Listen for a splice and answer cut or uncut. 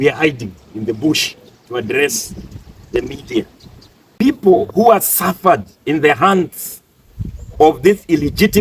cut